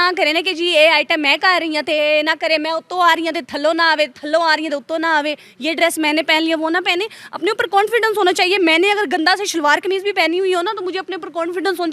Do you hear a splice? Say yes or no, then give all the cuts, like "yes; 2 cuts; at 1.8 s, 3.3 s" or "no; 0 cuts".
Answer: no; 0 cuts